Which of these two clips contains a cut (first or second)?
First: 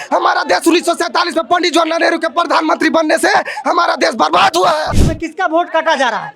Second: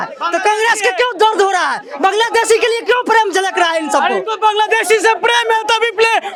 first